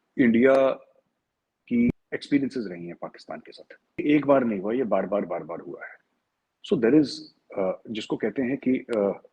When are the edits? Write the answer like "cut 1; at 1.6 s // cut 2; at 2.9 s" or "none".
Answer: cut 1; at 1.9 s // cut 2; at 4.0 s